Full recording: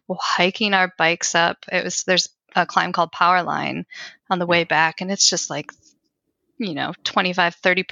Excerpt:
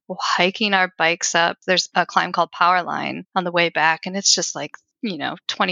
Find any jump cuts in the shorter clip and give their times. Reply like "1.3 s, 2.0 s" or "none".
1.7 s, 3.2 s, 4.8 s